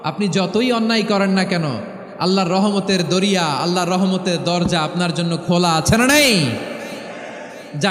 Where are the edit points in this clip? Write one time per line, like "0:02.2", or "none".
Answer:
none